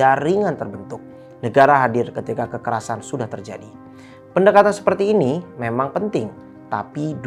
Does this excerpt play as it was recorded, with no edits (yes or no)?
yes